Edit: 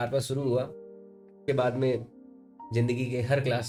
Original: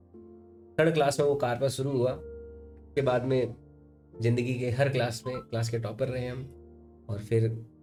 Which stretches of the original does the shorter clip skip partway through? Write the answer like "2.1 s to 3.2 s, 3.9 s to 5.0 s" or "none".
none